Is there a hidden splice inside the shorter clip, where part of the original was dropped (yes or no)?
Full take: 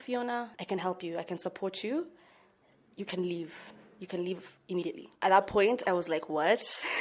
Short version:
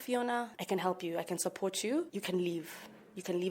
yes